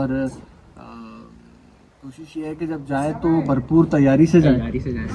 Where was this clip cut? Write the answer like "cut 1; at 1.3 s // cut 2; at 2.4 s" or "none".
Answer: none